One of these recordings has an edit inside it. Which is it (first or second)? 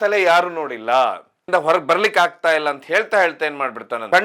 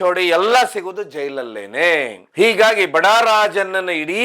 first